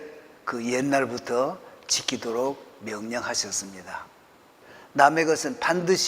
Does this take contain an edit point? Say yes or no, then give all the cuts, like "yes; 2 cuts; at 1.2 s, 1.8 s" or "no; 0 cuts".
yes; 1 cut; at 4.7 s